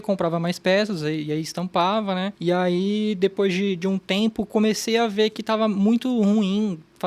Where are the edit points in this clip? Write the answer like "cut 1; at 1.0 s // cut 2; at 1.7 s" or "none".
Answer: cut 1; at 2.3 s